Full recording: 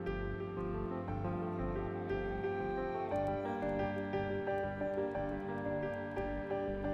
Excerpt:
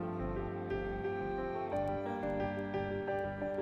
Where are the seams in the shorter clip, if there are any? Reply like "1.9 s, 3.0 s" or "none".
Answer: none